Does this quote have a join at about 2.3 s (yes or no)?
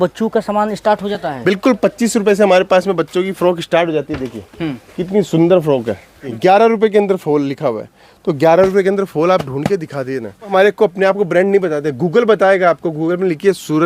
no